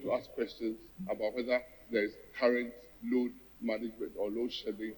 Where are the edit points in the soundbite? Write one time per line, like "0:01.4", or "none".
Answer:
0:00.9
0:03.2